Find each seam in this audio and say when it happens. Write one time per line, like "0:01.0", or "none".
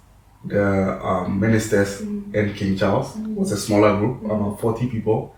none